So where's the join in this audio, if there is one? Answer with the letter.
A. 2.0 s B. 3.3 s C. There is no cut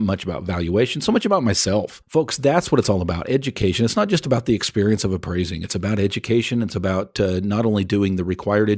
A